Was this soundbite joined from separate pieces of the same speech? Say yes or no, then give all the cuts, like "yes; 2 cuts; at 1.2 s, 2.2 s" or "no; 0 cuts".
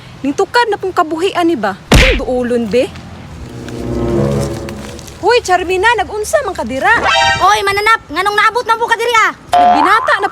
no; 0 cuts